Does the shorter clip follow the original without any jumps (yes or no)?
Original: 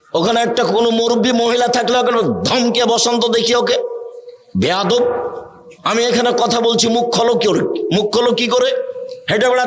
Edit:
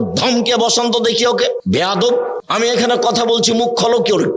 no